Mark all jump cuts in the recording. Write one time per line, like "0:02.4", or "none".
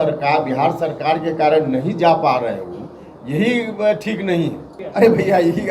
0:04.7